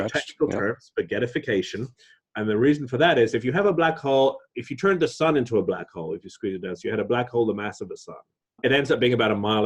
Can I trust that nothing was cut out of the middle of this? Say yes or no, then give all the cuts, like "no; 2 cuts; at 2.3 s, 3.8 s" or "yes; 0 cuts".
no; 1 cut; at 8.6 s